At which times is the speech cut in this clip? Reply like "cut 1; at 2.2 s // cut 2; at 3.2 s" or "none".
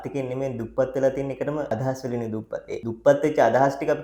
cut 1; at 1.7 s // cut 2; at 2.8 s